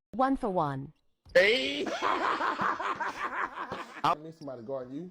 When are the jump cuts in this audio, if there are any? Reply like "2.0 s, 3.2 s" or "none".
none